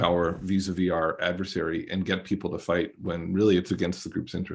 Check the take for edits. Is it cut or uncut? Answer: uncut